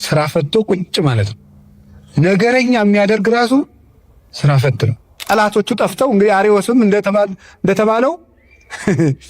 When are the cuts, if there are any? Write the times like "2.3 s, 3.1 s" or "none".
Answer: 5.1 s